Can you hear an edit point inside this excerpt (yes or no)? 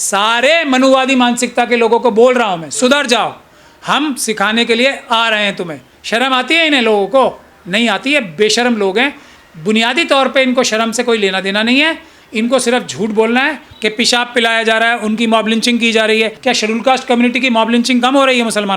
yes